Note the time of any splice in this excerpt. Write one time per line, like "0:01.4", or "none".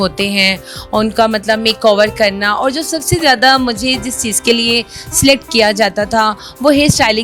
none

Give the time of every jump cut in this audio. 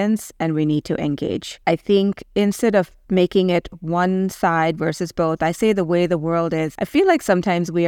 0:01.5
0:06.7

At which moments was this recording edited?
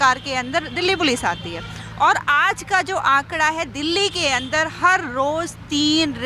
none

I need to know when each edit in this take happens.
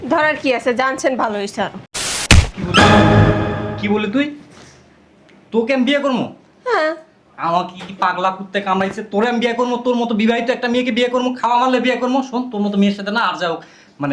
0:02.1

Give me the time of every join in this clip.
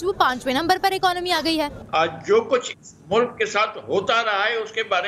0:01.8

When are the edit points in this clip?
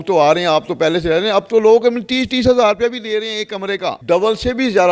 0:04.0

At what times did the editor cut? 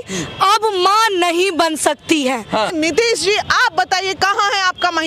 0:02.7

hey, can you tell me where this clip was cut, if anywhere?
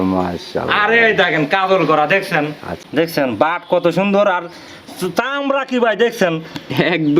0:02.9

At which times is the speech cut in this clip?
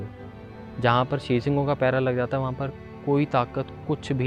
none

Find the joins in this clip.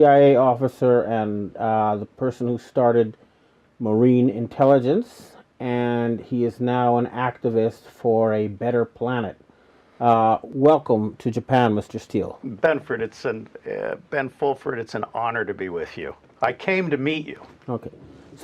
0:02.1

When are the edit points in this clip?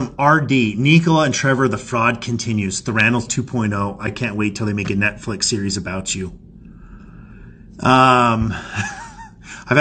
none

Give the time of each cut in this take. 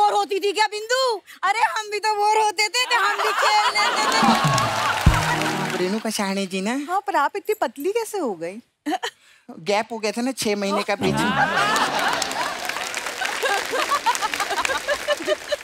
0:05.7

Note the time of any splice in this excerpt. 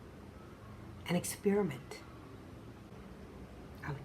0:02.9

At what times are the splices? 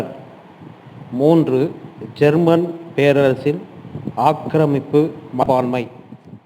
0:05.4

